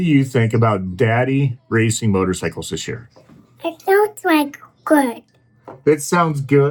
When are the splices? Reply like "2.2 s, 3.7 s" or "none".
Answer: none